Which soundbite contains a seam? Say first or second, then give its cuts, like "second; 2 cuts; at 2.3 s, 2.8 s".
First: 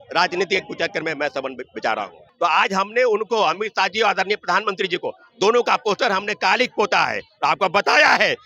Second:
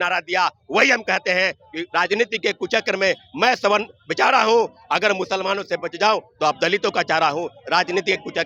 first; 1 cut; at 2.3 s